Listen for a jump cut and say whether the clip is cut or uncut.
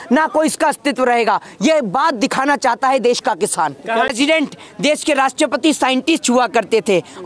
cut